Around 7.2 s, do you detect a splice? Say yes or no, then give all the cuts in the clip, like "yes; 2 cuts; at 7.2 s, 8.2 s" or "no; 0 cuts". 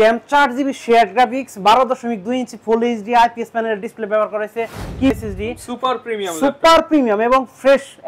no; 1 cut; at 5.1 s